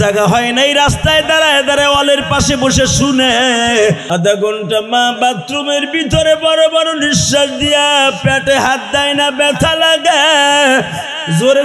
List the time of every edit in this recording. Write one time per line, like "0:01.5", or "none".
0:04.0